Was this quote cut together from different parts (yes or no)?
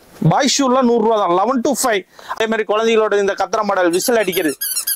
yes